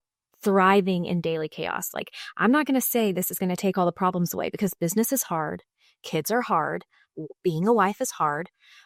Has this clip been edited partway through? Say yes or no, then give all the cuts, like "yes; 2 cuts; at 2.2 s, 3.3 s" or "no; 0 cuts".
no; 0 cuts